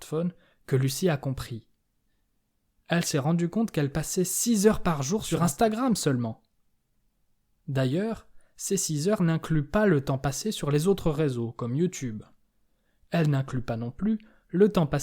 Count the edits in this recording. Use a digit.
1